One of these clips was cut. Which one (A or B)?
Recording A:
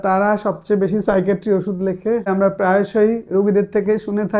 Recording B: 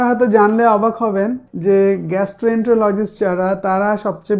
A